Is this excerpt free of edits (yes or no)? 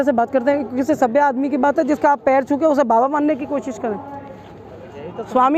yes